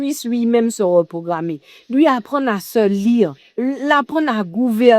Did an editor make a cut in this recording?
no; 0 cuts

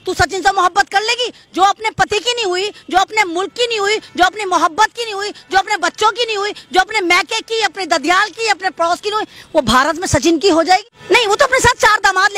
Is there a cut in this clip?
yes; 1 cut; at 10.9 s

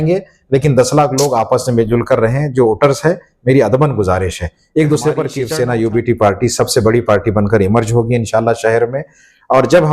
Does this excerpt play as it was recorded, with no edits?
no; 1 cut; at 5.4 s

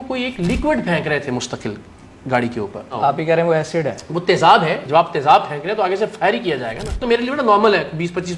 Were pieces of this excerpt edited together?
yes; 3 cuts; at 2.9 s, 4.8 s, 6.9 s

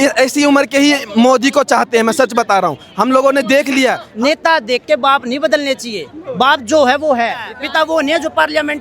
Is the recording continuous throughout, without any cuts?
no; 2 cuts; at 4.1 s, 7.6 s

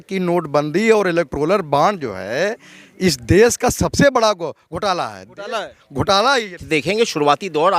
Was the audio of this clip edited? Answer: yes; 1 cut; at 6.6 s

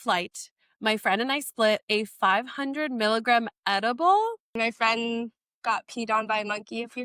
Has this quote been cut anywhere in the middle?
yes; 2 cuts; at 4.5 s, 5.4 s

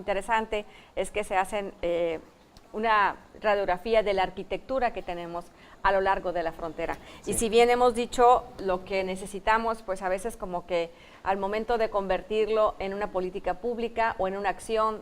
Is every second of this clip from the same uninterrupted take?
no; 1 cut; at 4.6 s

